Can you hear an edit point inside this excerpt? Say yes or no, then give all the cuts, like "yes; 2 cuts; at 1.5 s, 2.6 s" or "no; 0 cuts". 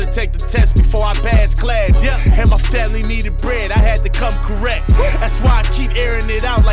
no; 0 cuts